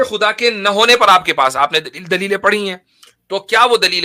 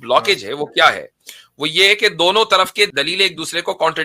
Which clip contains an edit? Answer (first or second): second